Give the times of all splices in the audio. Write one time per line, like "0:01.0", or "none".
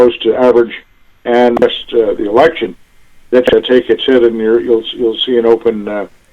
0:01.6
0:03.5